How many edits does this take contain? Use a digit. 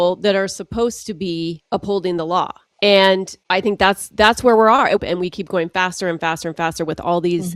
4